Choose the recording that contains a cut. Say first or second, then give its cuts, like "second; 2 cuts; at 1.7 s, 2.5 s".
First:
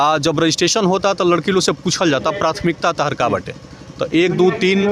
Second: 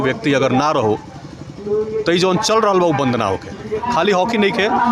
second; 1 cut; at 3.9 s